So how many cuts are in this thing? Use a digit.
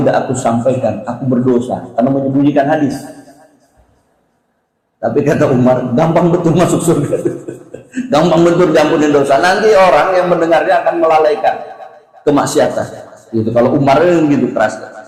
0